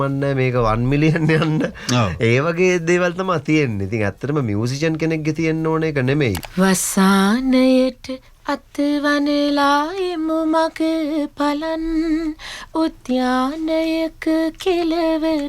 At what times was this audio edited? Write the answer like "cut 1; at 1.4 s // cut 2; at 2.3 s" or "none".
cut 1; at 6.4 s